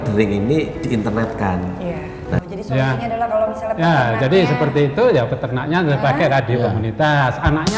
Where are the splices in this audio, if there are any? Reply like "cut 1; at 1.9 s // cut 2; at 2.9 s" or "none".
cut 1; at 2.4 s